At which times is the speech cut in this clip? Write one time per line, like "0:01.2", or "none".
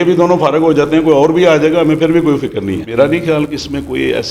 0:02.9

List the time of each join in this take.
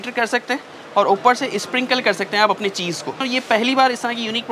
0:03.2

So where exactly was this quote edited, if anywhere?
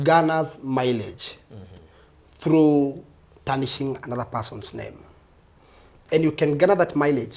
none

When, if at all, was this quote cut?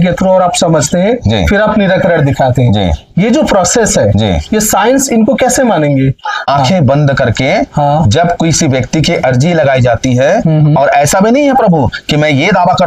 0:06.5

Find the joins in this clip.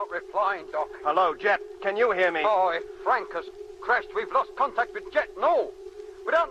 0:01.5

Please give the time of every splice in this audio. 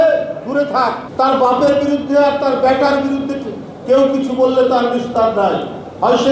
0:01.0

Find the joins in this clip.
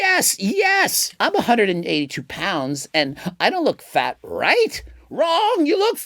0:01.0

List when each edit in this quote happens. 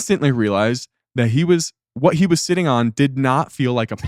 none

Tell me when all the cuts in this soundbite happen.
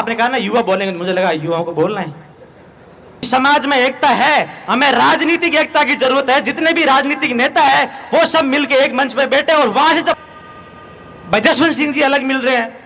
0:03.3
0:10.2

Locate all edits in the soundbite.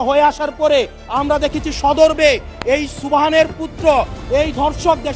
none

